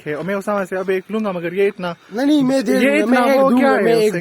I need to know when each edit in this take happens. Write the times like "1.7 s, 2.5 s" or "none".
none